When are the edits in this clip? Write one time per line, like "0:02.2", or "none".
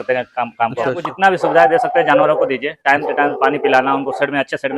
0:01.1